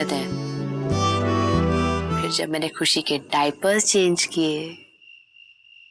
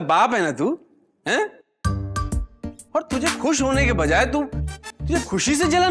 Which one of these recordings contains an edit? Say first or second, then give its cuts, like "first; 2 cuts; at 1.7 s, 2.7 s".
first; 1 cut; at 2.1 s